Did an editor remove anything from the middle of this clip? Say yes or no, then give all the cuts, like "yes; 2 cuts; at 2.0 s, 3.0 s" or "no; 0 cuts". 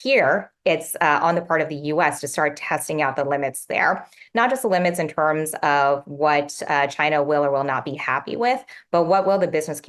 no; 0 cuts